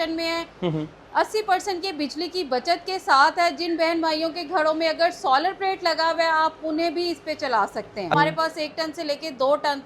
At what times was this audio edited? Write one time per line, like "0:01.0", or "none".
0:08.1

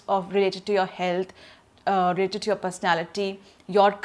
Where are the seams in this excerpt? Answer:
none

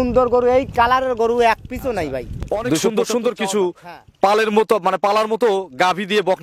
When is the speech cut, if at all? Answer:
0:02.8

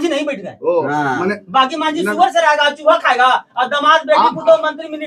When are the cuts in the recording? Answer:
none

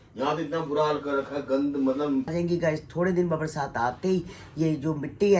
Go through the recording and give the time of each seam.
0:02.3

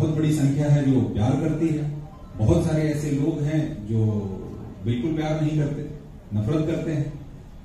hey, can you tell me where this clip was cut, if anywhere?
none

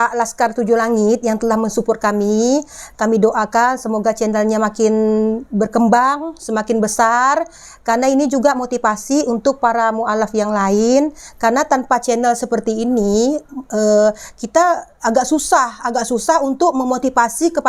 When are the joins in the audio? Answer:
none

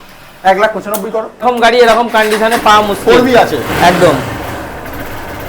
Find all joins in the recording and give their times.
0:01.4

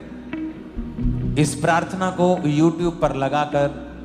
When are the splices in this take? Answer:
0:00.9

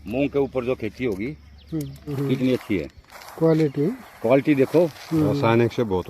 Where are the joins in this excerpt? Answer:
0:02.1

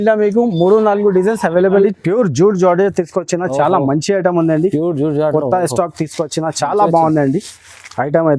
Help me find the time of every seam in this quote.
0:01.7

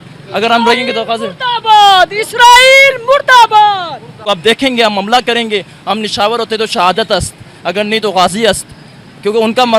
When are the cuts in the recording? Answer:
0:04.2

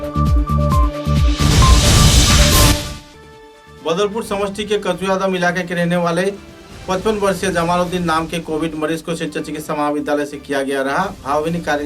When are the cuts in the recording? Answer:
0:02.7

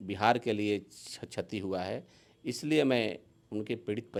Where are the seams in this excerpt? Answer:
none

